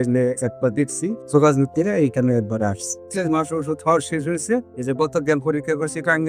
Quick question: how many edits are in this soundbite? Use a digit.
2